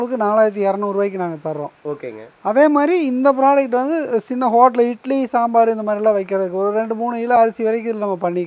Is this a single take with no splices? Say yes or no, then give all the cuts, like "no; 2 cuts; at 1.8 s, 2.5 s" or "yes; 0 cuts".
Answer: yes; 0 cuts